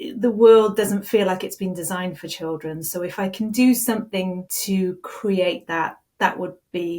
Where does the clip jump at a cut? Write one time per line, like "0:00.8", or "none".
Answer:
0:04.5